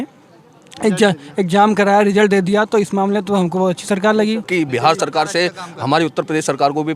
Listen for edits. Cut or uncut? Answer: cut